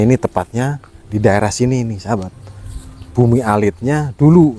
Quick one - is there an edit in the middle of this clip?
no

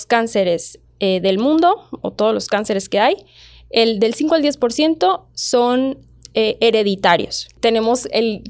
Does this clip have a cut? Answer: yes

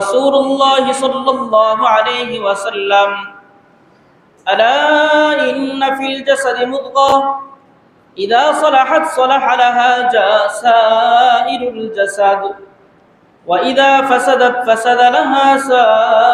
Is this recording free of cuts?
yes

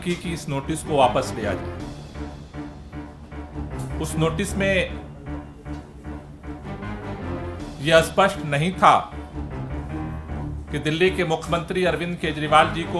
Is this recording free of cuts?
yes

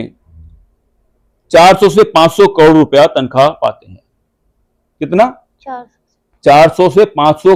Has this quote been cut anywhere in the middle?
no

